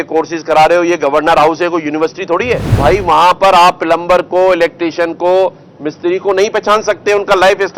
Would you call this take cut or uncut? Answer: cut